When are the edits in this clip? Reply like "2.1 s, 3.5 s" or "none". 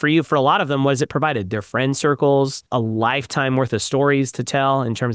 2.6 s